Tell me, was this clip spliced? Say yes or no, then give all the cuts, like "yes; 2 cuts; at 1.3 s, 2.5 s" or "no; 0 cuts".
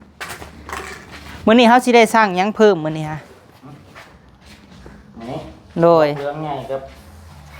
no; 0 cuts